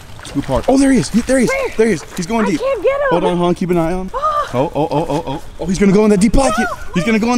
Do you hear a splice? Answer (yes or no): yes